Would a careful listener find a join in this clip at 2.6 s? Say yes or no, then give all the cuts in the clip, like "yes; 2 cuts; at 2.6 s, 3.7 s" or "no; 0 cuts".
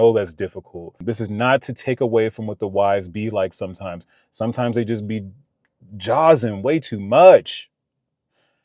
no; 1 cut; at 1.1 s